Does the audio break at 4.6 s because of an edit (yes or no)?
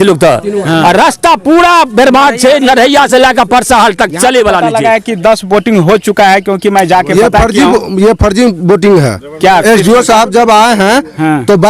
yes